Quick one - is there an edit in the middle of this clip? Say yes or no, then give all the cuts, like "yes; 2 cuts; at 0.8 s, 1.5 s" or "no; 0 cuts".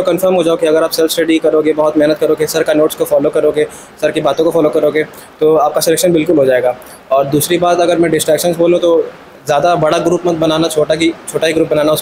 no; 0 cuts